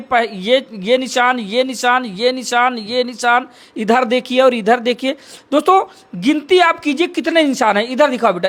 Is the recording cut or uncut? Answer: uncut